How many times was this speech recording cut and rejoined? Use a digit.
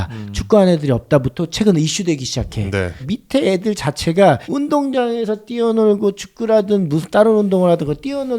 2